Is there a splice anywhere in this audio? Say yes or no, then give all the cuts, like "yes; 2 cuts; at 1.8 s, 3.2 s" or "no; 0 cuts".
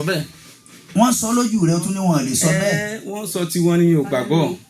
no; 0 cuts